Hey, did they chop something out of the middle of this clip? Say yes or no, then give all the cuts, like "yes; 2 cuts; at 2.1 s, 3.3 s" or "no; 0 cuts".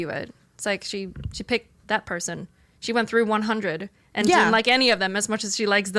yes; 1 cut; at 2.7 s